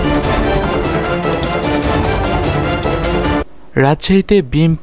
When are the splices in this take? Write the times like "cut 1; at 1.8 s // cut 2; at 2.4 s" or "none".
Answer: cut 1; at 3.4 s